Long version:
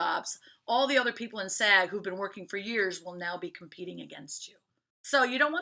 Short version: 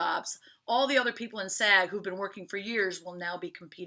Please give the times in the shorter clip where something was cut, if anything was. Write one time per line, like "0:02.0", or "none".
none

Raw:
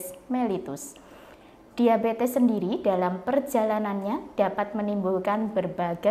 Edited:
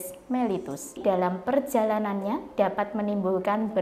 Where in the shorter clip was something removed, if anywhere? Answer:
0:01.0

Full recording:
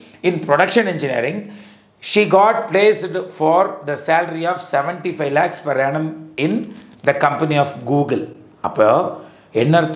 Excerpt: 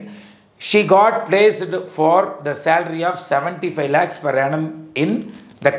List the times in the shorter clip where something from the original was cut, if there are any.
none

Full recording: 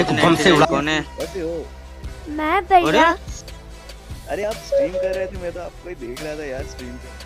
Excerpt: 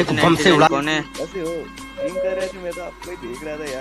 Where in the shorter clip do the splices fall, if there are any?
0:02.0

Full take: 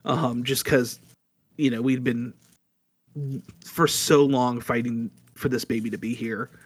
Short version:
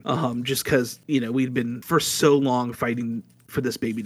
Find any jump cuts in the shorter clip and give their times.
0:01.0
0:01.8

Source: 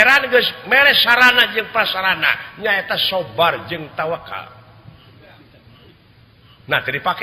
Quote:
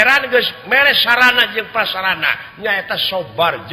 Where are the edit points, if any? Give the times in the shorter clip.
none

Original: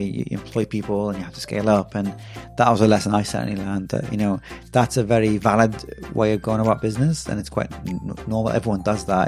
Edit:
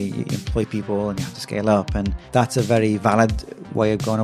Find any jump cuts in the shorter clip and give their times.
0:02.2

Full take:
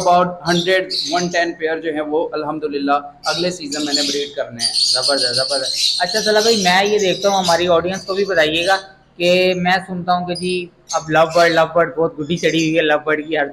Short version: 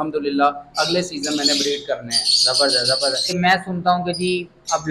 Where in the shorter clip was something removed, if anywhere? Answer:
0:03.4

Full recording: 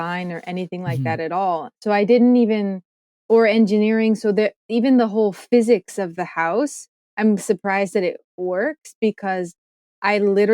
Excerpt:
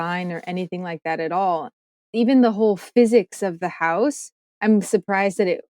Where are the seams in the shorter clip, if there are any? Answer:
0:01.9

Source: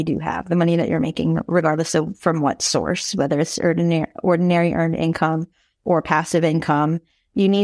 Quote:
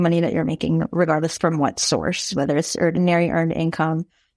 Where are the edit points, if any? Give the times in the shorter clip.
0:01.3
0:03.0

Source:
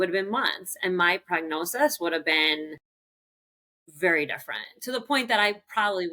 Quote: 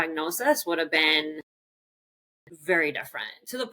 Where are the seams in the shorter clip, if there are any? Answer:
none

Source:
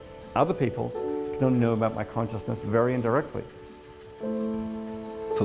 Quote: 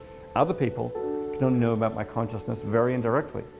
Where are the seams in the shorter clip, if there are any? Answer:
none

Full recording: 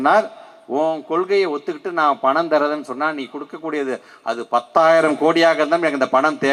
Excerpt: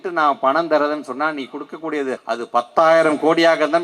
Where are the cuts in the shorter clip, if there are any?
0:02.2

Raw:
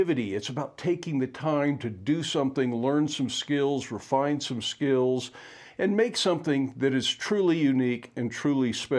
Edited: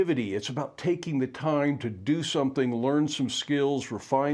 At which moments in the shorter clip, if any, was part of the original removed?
none

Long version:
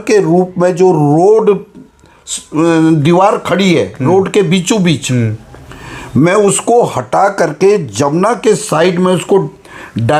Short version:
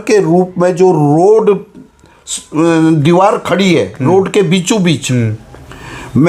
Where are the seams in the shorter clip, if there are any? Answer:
none

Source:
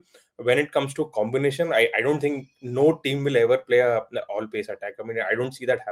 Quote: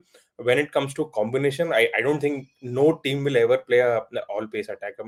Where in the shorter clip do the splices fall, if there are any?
none

